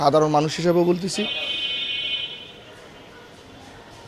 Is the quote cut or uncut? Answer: uncut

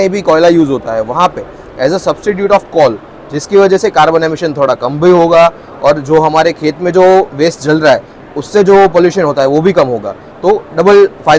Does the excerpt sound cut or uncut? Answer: uncut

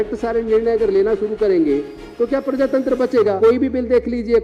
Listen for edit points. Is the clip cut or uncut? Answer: cut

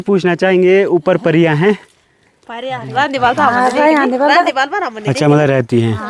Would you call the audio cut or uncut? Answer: uncut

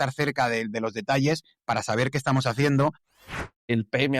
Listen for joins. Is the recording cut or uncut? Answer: cut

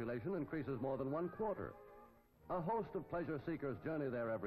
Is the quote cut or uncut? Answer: cut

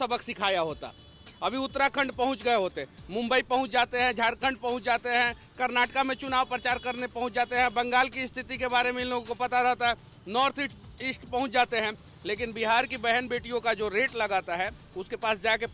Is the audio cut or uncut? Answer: uncut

